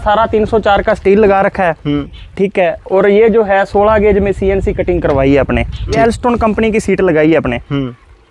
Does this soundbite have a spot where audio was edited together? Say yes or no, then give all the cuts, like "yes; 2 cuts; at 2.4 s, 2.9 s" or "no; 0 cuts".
yes; 1 cut; at 5.9 s